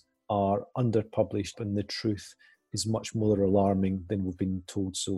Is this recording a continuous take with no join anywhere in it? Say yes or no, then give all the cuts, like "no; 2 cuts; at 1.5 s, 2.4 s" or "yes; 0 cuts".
no; 1 cut; at 1.5 s